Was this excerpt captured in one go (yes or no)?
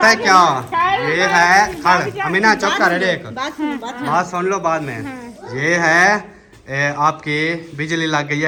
yes